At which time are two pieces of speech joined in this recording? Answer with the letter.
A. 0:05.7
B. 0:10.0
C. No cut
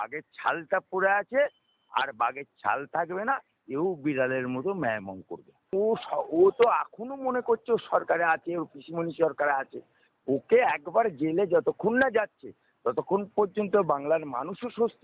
A